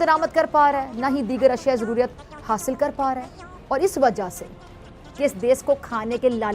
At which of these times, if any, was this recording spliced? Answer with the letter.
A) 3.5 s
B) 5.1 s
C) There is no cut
B